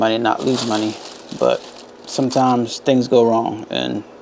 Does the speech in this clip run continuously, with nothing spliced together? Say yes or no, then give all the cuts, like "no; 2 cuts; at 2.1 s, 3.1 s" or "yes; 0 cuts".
yes; 0 cuts